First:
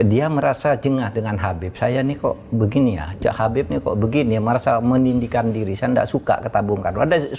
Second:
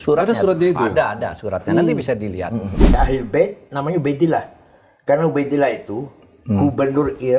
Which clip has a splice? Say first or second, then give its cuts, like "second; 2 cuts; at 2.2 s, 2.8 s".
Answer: second; 1 cut; at 3.0 s